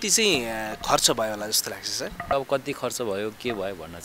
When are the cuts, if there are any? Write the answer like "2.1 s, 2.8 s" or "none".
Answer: 2.3 s